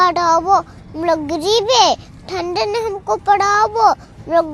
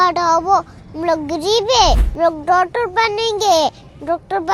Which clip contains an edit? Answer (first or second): second